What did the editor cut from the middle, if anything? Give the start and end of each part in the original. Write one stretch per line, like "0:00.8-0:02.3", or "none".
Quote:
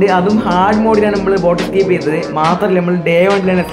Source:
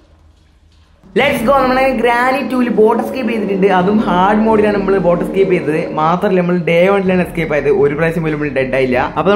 none